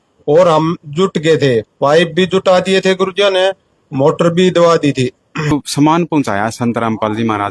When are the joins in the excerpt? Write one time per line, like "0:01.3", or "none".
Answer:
0:05.5